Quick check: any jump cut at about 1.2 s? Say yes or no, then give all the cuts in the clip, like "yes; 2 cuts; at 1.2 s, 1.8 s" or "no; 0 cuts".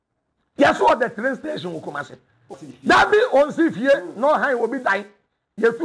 no; 1 cut; at 2.6 s